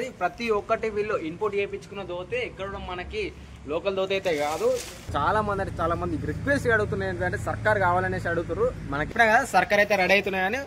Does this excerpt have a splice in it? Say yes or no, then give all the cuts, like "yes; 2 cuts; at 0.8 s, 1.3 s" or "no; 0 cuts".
yes; 2 cuts; at 5.0 s, 9.0 s